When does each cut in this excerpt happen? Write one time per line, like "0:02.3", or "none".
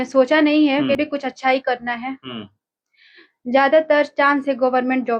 0:00.9

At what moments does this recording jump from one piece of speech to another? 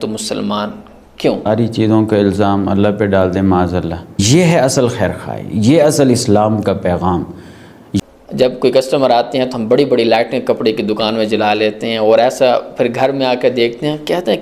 0:01.5
0:04.2
0:08.0

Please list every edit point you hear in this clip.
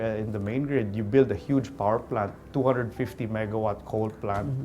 0:02.4

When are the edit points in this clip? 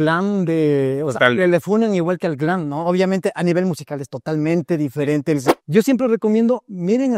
0:05.4

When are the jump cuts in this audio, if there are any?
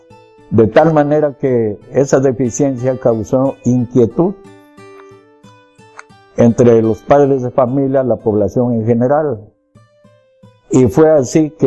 0:07.9

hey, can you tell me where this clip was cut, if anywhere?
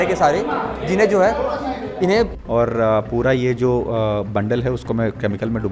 0:02.4

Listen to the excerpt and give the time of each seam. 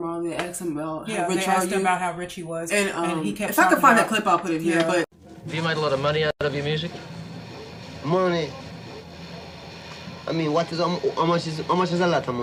none

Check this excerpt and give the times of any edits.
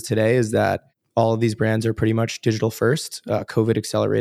0:00.9

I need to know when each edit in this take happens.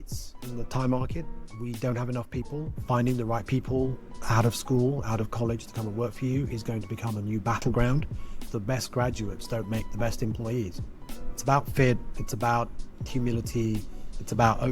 0:02.7
0:08.4

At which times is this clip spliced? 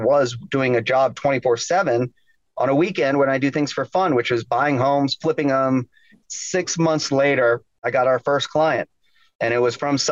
0:06.2
0:07.9

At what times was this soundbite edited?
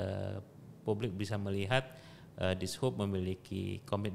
none

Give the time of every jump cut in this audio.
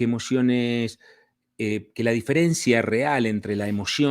none

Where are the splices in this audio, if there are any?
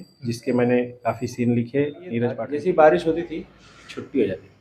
0:02.5

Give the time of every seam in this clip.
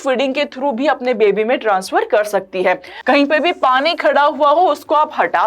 0:02.9

